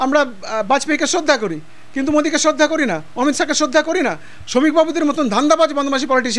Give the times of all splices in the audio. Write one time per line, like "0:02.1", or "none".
none

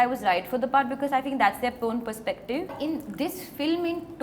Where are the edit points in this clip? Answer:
0:02.7

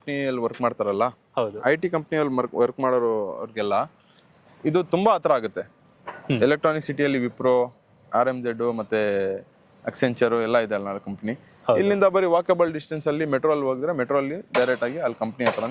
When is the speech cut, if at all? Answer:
none

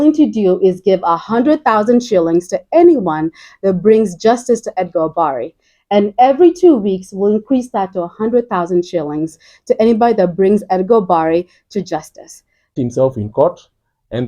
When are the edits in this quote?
0:12.6

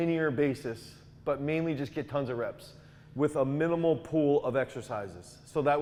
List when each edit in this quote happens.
none

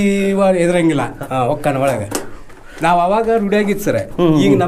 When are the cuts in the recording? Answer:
0:01.1

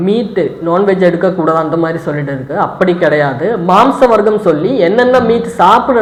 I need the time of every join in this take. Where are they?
none

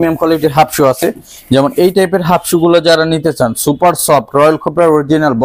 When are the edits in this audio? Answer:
none

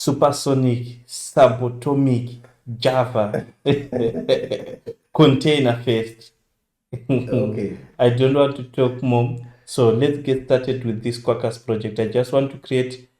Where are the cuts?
none

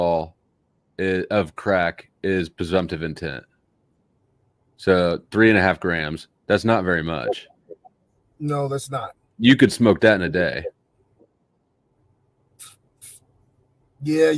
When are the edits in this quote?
none

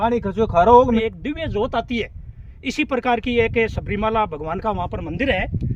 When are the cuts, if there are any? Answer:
0:01.0

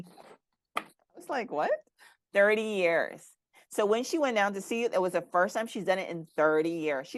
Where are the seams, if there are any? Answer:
none

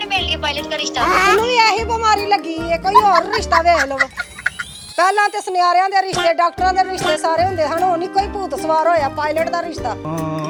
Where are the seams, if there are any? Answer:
none

